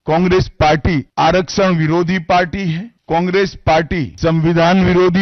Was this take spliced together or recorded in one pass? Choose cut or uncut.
cut